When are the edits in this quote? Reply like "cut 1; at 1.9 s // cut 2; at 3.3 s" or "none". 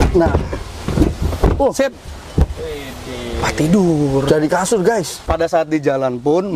cut 1; at 5.2 s